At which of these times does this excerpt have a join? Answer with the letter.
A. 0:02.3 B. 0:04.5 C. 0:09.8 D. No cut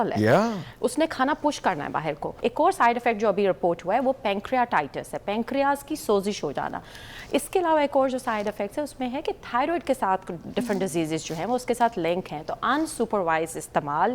A